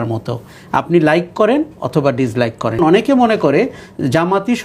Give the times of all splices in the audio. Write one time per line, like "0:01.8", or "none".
0:02.8